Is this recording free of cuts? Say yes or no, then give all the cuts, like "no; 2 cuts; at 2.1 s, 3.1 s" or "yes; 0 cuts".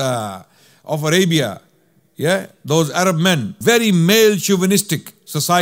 no; 1 cut; at 3.5 s